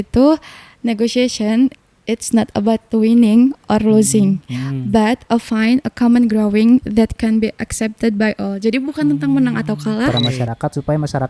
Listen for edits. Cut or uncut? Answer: cut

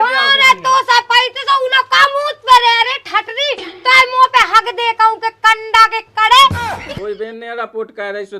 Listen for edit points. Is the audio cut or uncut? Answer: cut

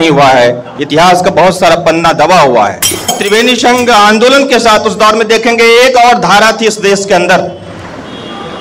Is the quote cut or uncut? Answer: cut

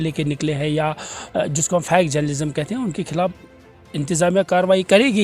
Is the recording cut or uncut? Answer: uncut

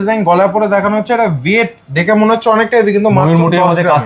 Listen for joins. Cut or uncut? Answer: uncut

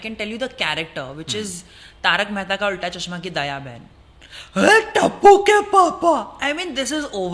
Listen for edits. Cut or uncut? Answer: uncut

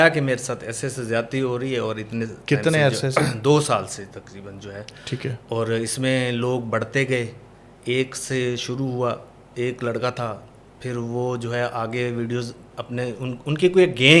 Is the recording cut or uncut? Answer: uncut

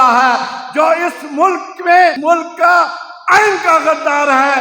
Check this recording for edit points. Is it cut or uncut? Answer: cut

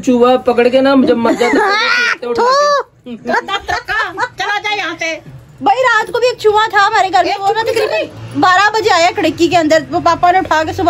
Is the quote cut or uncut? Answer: cut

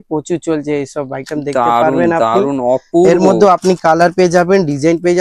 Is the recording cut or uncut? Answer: uncut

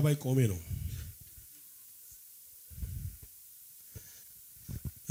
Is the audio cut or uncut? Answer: uncut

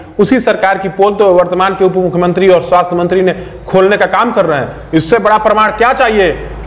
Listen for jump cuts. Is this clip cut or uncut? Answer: uncut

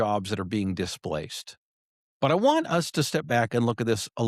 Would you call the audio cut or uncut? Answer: uncut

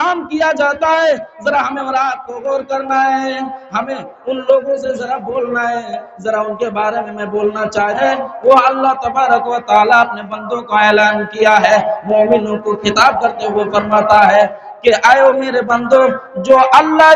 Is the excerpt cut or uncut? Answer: cut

